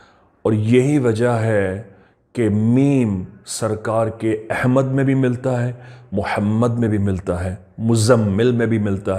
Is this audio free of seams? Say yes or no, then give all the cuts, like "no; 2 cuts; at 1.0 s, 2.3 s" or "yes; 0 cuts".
yes; 0 cuts